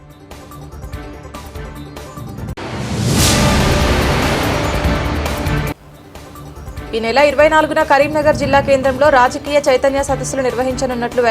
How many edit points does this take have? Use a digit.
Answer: 1